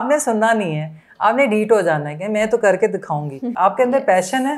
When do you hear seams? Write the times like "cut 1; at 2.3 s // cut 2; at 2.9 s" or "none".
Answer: cut 1; at 3.5 s